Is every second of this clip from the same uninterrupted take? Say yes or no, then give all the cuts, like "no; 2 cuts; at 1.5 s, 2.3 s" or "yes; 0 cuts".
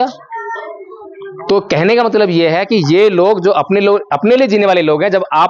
yes; 0 cuts